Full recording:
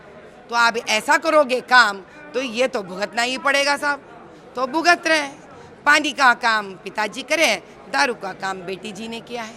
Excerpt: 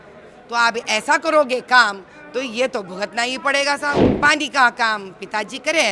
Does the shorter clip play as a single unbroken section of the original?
no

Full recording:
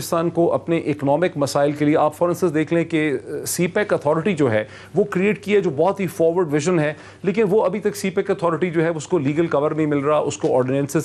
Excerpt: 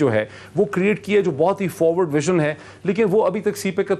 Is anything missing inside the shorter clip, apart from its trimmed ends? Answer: no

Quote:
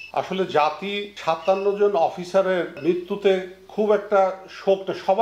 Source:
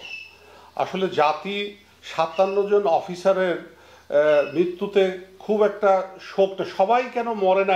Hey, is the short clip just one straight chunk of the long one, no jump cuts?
no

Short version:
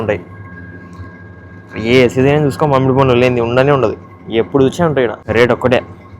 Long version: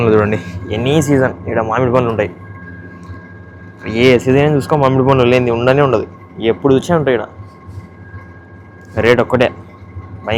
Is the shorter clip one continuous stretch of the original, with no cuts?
no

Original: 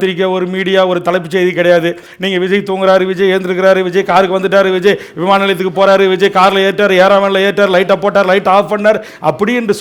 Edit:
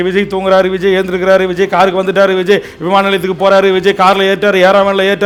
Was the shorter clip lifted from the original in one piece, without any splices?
yes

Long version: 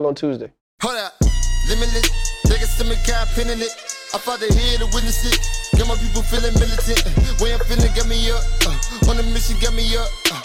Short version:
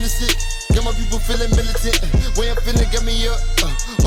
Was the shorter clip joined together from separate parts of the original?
no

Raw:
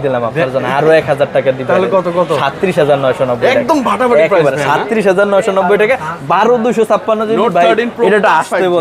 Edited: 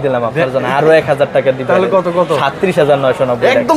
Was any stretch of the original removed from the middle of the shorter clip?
no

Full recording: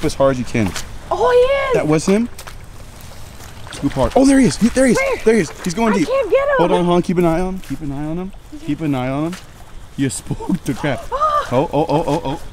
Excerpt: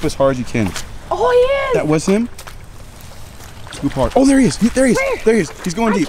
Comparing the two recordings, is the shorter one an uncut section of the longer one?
yes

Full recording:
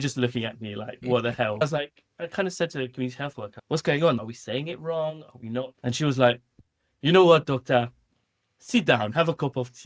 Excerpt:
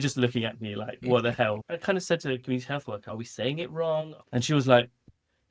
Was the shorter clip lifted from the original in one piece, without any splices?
no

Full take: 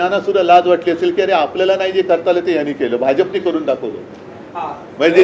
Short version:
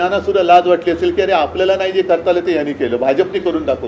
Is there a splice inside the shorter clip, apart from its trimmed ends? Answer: no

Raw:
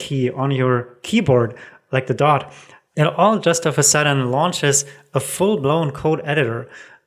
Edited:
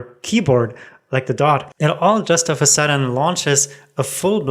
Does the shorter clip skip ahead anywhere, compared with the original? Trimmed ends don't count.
yes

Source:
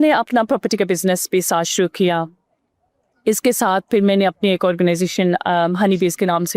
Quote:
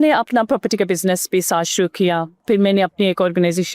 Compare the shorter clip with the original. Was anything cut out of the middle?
yes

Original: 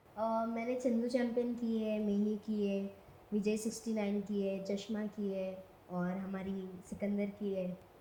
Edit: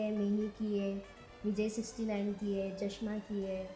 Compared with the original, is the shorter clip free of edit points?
yes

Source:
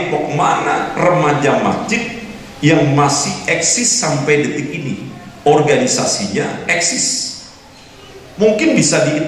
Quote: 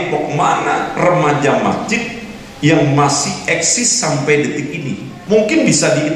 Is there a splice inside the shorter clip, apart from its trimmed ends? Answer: yes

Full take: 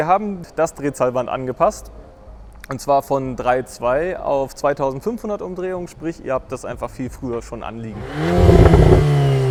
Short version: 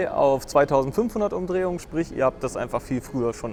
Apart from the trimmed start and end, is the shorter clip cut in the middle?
no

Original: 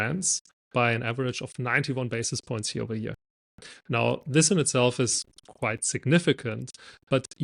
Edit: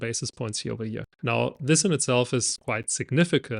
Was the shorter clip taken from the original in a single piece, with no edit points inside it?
no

